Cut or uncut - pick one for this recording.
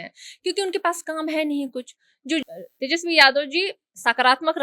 cut